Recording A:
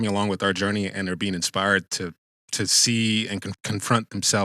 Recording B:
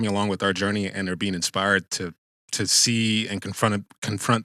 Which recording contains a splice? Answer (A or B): A